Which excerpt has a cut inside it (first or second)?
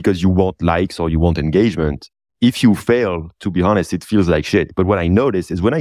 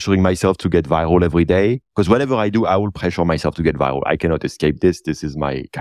first